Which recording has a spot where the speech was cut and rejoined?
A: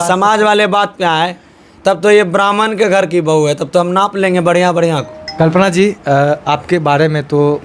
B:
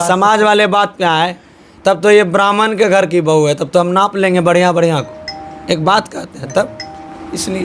A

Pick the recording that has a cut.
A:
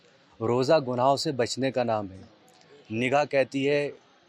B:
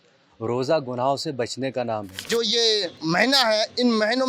B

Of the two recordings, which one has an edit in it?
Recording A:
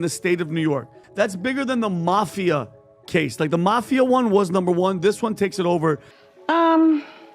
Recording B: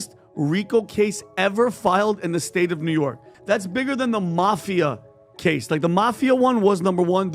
A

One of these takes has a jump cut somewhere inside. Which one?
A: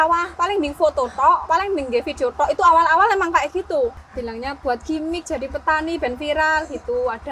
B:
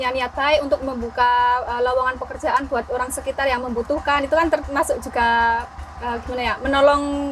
A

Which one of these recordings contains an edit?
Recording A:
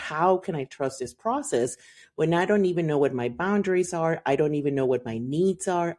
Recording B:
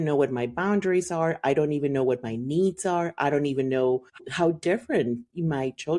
B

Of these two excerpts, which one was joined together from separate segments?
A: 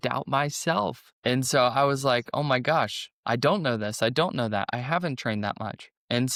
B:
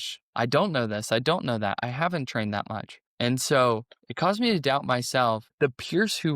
B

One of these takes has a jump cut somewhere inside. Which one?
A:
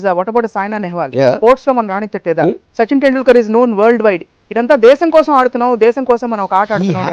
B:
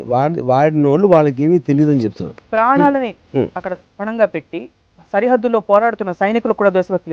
B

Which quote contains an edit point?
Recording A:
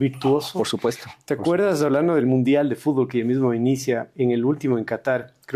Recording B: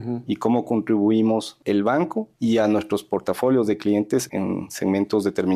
B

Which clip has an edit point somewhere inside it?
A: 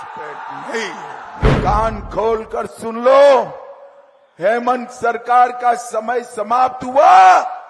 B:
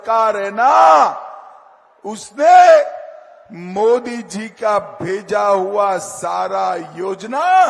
A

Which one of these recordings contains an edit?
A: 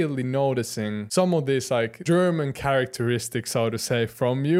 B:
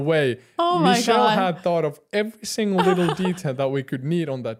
A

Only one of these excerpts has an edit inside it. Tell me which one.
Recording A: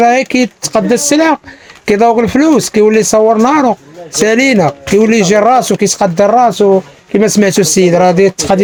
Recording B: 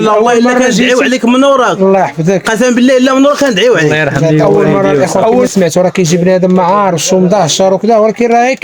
B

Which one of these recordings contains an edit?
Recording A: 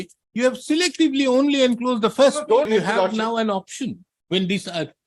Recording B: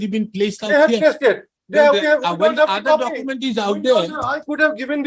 A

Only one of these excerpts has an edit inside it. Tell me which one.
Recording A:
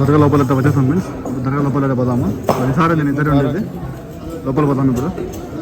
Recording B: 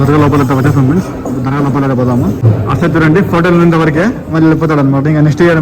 B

